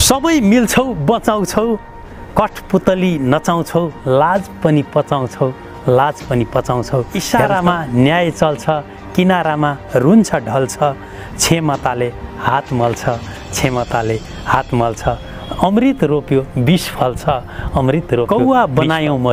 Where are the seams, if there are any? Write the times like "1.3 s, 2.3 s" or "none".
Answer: 7.2 s, 18.3 s